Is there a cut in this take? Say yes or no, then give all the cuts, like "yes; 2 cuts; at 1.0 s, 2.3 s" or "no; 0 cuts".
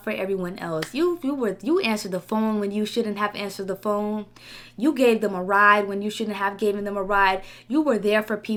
no; 0 cuts